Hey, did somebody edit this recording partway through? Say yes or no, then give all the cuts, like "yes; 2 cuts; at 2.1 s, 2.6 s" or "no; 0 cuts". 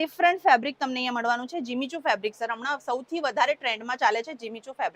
no; 0 cuts